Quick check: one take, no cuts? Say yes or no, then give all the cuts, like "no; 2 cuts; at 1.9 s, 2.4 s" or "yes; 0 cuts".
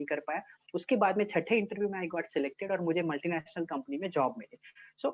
yes; 0 cuts